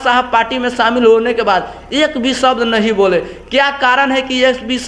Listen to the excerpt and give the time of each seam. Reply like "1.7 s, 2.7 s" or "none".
none